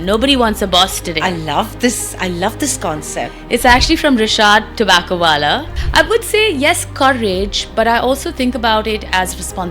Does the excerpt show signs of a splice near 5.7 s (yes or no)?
yes